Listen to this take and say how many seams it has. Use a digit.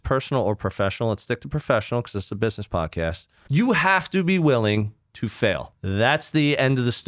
2